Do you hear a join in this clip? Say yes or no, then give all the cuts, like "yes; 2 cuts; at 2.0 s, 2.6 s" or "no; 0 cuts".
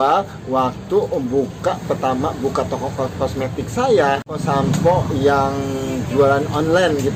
no; 0 cuts